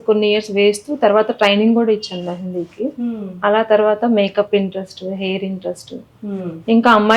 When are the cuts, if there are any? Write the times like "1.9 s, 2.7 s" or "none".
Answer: none